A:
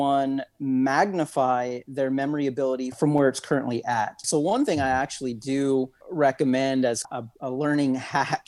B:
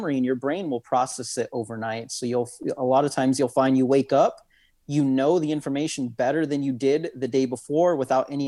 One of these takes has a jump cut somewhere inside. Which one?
A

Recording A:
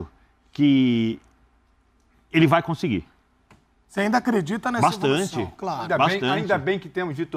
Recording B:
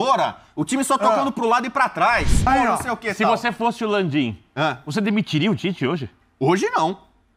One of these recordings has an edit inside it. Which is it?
B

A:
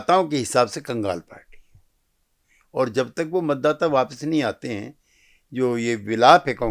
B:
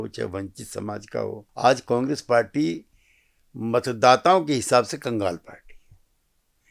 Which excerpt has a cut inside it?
B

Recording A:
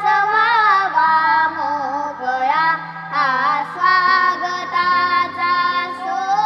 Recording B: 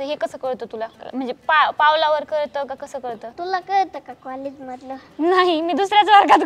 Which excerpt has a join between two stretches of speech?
B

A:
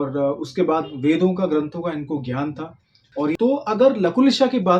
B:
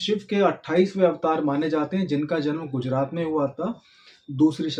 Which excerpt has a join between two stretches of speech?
A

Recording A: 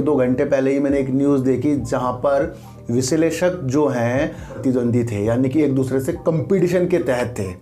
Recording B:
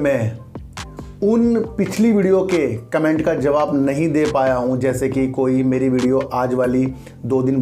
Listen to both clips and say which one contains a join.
A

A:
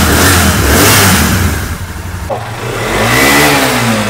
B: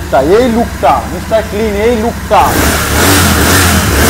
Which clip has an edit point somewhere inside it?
A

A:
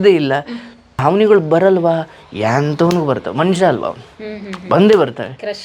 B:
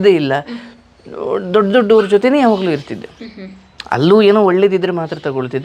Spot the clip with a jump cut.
A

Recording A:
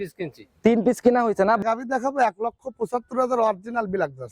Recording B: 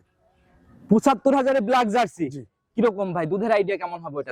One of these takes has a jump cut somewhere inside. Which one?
A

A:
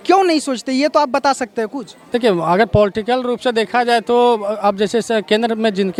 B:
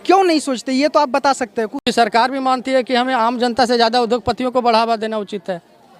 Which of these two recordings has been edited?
B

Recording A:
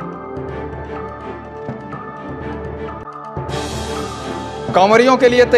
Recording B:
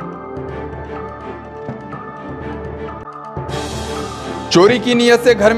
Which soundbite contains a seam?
B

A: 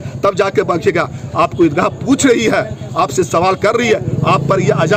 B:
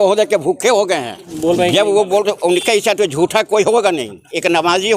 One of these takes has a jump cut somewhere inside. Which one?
B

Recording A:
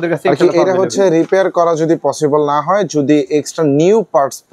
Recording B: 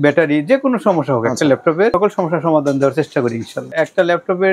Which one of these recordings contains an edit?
B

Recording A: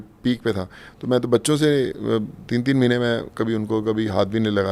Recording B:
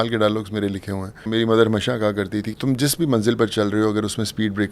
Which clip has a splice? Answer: B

